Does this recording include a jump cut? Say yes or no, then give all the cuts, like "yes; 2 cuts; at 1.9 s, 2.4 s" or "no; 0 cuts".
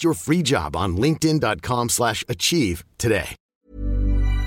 yes; 1 cut; at 3.5 s